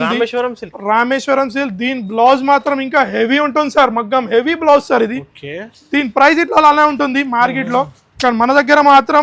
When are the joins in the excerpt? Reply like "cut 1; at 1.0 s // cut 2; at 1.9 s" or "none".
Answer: none